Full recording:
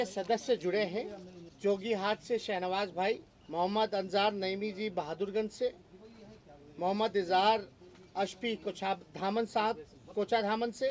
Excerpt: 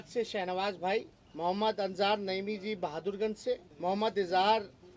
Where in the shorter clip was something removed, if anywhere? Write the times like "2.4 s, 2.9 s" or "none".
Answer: 3.7 s

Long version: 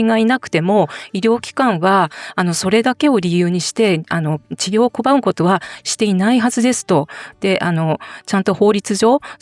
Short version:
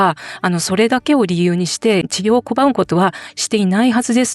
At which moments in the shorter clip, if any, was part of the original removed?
2.1 s

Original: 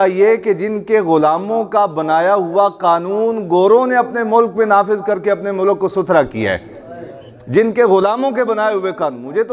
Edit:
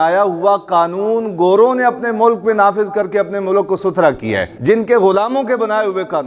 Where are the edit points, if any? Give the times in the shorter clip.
4.5 s

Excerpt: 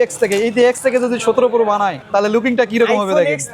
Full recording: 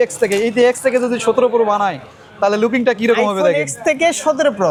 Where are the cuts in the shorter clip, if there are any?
2.0 s

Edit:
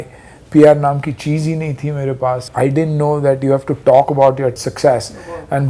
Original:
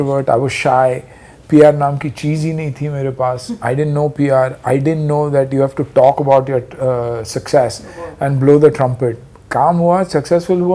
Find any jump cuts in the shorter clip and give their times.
2.5 s, 4.6 s

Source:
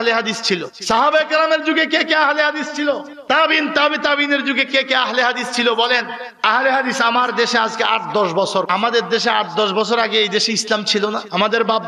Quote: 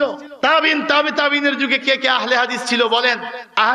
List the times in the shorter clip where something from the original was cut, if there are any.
none

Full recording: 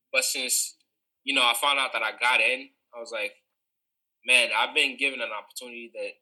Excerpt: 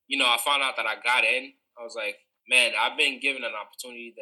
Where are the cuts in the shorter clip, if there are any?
2.3 s

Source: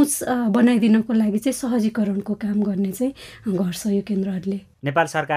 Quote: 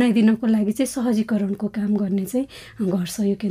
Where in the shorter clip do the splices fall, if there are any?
none

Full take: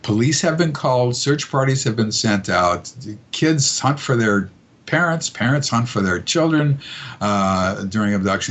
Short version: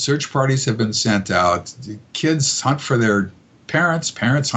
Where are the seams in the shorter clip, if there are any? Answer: none

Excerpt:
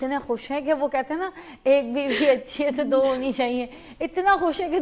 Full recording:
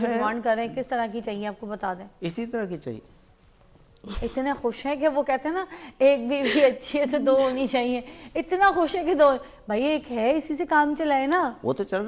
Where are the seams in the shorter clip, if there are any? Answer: none

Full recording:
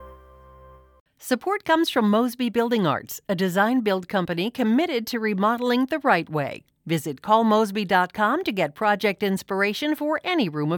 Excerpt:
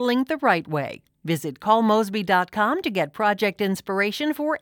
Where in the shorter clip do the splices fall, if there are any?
none

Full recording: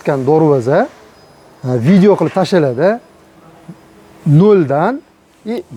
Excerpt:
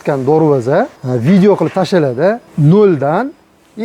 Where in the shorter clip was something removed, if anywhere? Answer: 1.0 s, 2.5 s

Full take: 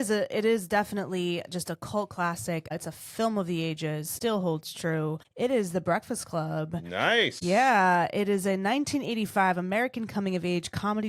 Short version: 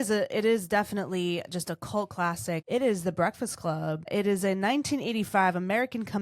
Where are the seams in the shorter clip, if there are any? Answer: 2.6 s, 4.1 s

